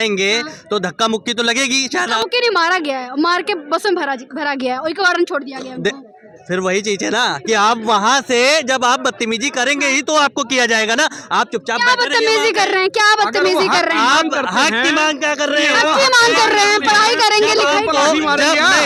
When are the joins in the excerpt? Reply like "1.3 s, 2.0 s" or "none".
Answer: none

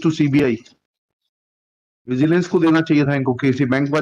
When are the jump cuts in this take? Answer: none

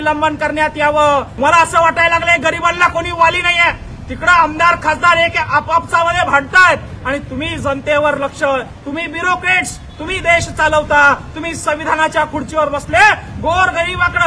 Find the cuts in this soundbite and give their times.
1.3 s

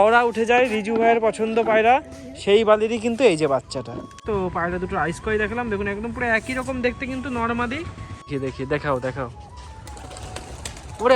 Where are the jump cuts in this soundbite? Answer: 4.2 s, 8.3 s

